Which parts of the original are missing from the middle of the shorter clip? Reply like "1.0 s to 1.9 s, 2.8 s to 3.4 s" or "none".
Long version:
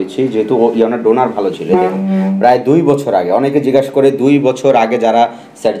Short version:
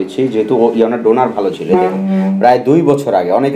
none